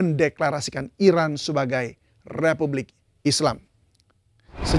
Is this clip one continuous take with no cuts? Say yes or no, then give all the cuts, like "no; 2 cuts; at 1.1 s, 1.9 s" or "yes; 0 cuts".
yes; 0 cuts